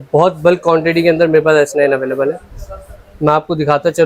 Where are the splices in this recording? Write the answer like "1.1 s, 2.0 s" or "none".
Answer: none